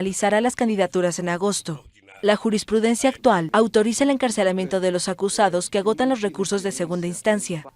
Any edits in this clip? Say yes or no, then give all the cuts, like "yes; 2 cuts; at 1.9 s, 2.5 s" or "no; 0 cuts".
yes; 1 cut; at 5.9 s